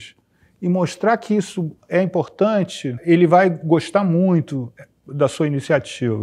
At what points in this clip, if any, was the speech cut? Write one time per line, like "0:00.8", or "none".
0:03.0